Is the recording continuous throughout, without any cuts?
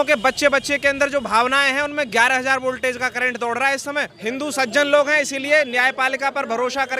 no; 1 cut; at 4.1 s

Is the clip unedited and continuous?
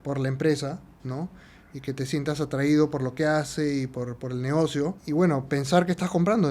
no; 1 cut; at 5.0 s

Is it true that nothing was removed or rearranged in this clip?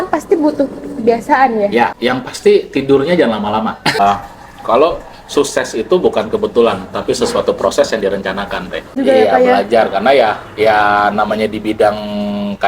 no; 3 cuts; at 1.9 s, 4.0 s, 9.0 s

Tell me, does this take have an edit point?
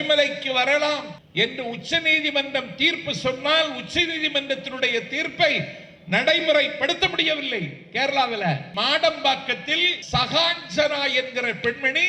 yes; 3 cuts; at 1.2 s, 8.7 s, 9.9 s

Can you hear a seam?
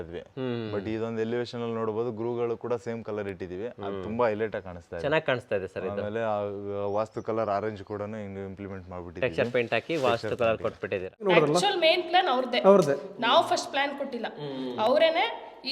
yes; 1 cut; at 11.3 s

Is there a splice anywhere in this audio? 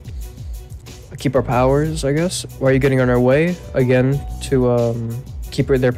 no; 0 cuts

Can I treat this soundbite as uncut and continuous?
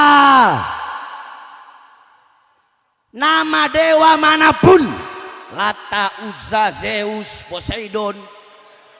yes; 0 cuts

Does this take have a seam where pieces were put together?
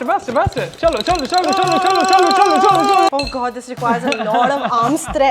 yes; 1 cut; at 3.1 s

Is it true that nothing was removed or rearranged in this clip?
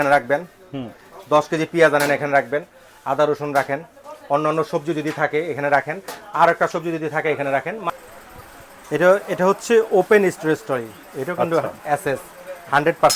no; 1 cut; at 7.9 s

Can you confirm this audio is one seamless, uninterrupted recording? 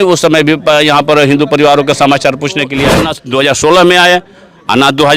no; 1 cut; at 3.1 s

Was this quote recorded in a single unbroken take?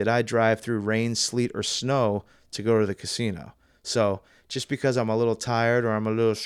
yes; 0 cuts

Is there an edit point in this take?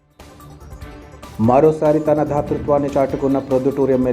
no; 0 cuts

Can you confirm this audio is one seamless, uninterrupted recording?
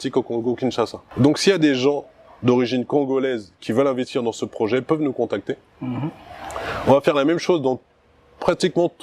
yes; 0 cuts

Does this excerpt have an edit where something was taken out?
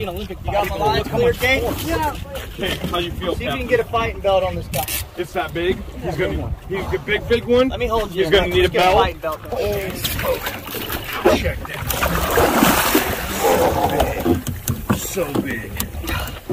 yes; 1 cut; at 9.5 s

